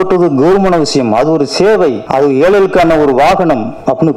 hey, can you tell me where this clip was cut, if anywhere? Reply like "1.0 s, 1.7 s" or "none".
2.0 s